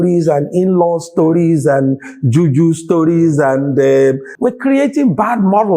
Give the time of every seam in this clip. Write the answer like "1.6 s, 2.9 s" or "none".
4.3 s